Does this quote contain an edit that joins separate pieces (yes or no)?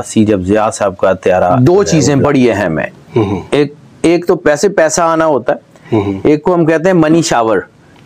yes